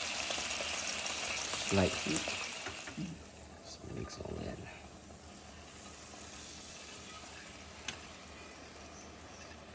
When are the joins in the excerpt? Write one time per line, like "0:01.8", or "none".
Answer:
0:02.7